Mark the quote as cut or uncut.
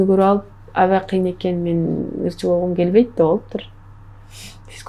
uncut